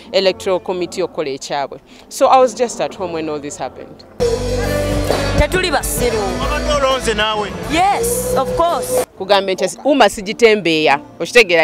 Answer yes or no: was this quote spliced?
yes